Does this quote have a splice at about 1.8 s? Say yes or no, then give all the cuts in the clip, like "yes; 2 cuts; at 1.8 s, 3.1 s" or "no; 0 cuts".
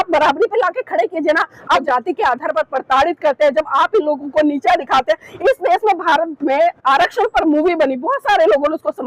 yes; 1 cut; at 1.8 s